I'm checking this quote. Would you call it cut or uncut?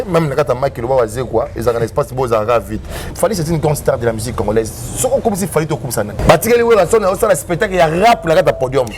cut